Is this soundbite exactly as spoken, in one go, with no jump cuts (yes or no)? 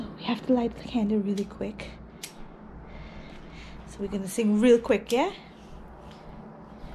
yes